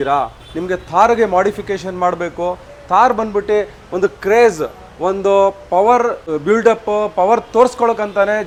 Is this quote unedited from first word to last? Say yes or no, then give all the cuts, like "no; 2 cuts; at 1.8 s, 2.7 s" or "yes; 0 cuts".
yes; 0 cuts